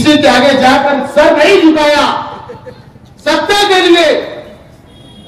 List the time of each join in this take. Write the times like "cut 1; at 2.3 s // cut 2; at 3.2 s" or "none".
none